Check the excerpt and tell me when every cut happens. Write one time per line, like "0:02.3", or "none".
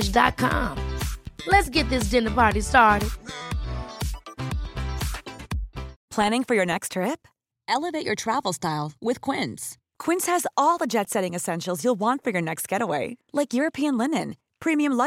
0:06.0